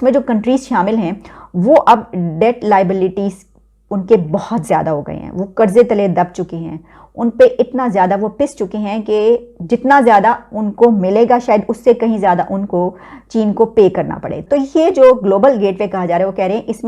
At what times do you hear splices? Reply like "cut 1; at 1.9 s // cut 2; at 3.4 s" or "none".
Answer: cut 1; at 14.4 s